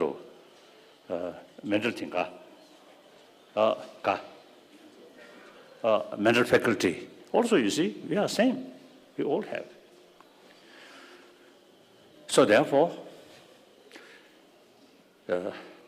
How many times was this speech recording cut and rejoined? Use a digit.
1